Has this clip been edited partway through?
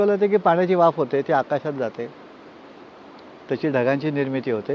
no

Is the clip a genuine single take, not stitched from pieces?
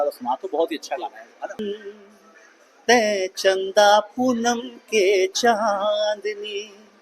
no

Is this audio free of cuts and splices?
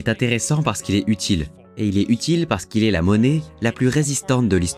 yes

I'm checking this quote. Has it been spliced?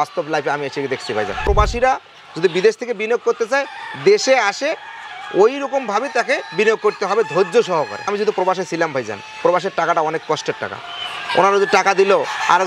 yes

